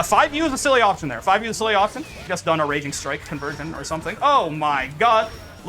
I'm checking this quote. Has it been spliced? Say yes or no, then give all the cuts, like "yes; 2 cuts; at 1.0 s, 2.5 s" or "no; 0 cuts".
yes; 1 cut; at 2.2 s